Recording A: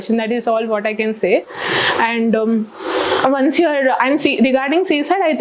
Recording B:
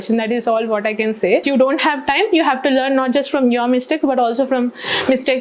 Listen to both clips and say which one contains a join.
B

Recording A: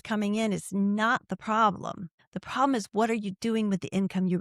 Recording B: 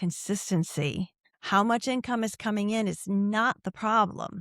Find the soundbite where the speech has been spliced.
B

